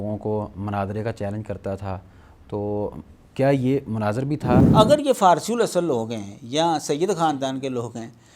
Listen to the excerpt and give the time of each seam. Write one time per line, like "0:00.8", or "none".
0:04.6